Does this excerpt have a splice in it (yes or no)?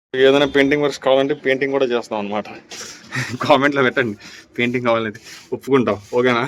no